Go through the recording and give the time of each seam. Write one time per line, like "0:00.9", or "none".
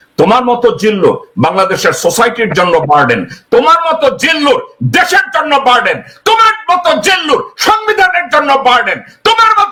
none